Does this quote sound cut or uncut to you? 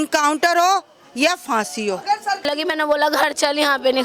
cut